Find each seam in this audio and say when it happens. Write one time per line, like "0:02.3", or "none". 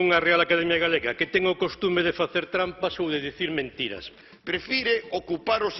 0:04.2